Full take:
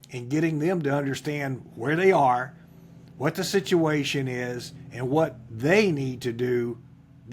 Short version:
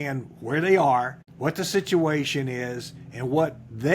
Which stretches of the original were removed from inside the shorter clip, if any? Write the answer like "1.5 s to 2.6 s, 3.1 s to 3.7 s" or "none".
2.6 s to 3.0 s